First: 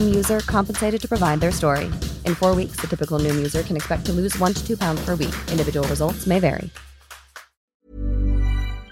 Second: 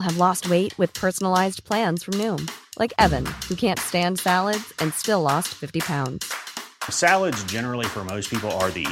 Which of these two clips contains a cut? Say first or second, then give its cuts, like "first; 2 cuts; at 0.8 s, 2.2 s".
first; 1 cut; at 7.6 s